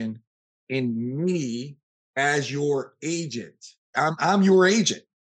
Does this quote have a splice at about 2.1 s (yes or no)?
no